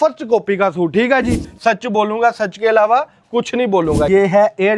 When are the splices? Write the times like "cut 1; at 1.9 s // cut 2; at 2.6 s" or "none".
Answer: cut 1; at 1.5 s // cut 2; at 4.1 s